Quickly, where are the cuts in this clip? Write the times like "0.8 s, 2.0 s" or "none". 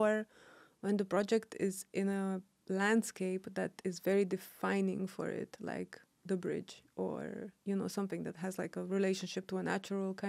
none

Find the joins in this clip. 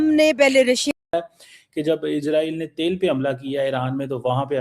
1.0 s

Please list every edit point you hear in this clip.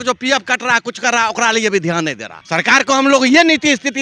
2.3 s

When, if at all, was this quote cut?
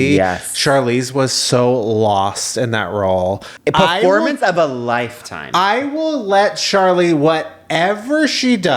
3.5 s

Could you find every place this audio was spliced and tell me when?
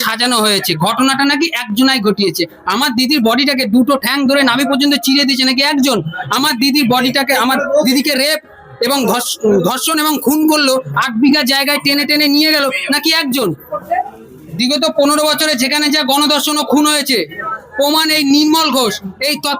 13.7 s

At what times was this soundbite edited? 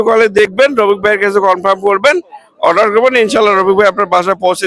none

